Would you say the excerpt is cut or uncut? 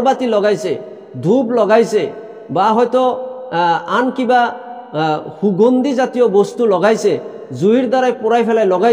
uncut